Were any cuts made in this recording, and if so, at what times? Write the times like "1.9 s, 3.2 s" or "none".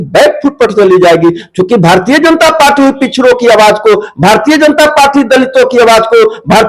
none